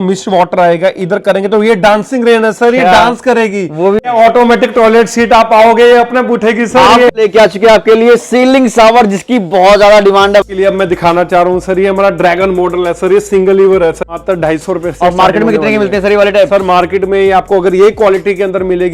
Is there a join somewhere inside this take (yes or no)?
yes